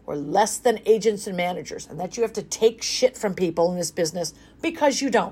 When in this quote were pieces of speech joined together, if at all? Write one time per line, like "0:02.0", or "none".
none